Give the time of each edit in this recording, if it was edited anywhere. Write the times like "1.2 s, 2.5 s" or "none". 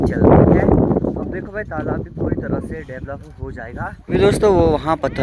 4.1 s

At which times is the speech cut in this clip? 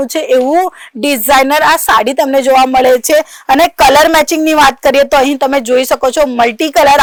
none

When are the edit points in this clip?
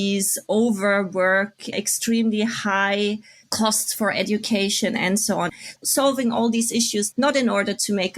5.5 s

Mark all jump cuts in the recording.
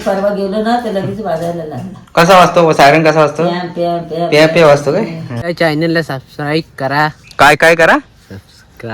5.4 s

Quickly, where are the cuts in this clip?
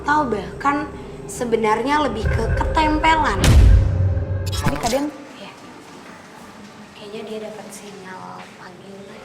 4.8 s

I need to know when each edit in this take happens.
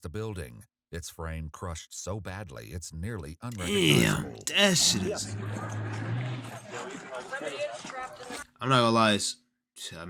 none

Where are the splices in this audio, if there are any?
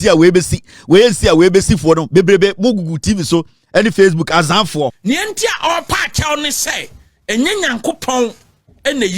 5.0 s

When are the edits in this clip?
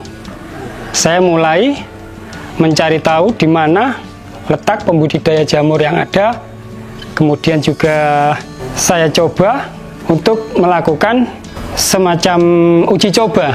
none

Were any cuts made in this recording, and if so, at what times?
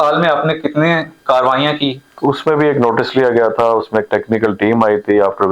2.1 s

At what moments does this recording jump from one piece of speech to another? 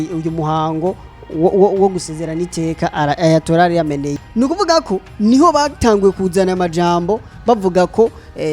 4.2 s

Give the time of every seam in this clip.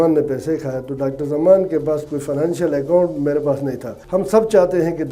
3.9 s

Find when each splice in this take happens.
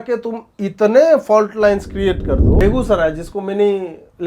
2.6 s

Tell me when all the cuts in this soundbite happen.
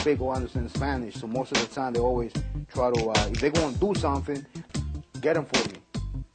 none

